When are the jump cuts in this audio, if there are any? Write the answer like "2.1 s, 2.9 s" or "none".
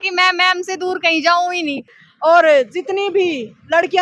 1.9 s